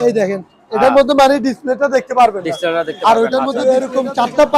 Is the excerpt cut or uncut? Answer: cut